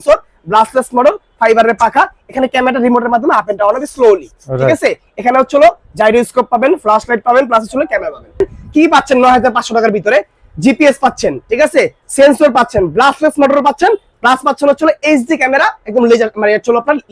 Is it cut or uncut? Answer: cut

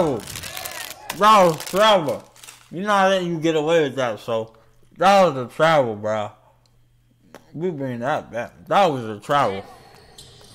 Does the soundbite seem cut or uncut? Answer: uncut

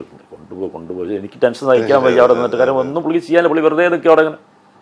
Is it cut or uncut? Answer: uncut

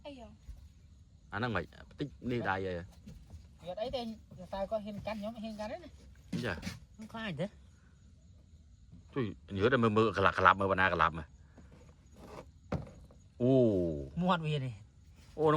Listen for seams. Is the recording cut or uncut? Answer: uncut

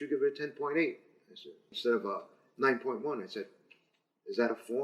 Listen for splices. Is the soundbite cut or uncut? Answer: cut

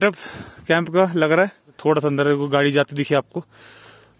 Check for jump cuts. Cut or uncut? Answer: cut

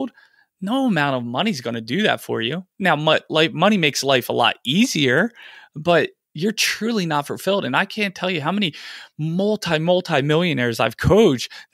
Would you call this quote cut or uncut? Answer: uncut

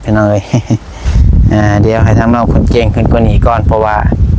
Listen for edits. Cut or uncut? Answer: uncut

